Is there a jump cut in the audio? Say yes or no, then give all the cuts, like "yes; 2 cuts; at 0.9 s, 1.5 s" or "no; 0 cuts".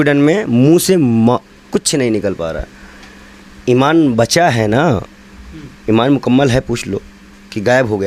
no; 0 cuts